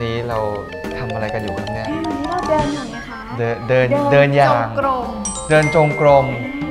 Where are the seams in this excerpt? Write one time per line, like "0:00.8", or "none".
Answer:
none